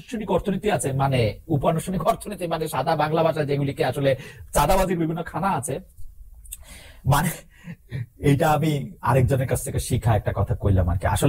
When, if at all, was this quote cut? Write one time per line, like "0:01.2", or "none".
none